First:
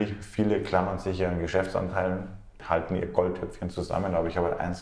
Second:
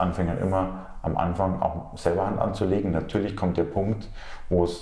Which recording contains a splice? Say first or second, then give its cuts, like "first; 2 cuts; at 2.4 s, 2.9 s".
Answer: first; 1 cut; at 2.6 s